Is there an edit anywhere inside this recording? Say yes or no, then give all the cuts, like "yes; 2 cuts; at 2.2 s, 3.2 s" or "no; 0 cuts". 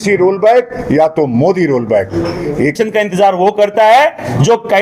yes; 1 cut; at 2.8 s